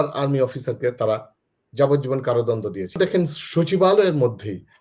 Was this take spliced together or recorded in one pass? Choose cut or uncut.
cut